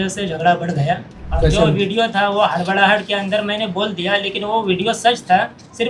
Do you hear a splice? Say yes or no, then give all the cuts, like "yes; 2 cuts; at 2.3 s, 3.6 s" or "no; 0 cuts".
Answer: yes; 1 cut; at 1.2 s